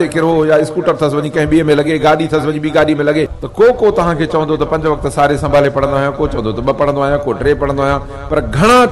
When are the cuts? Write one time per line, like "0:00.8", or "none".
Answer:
0:03.4